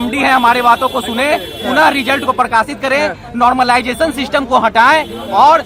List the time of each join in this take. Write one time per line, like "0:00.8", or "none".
none